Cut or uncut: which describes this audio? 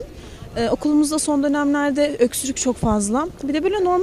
uncut